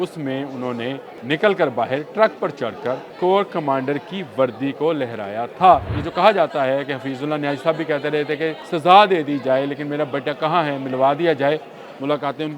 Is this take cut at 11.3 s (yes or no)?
no